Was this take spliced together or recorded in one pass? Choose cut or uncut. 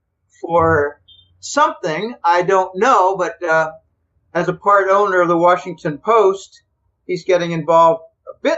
cut